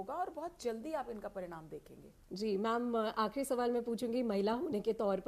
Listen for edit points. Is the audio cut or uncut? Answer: uncut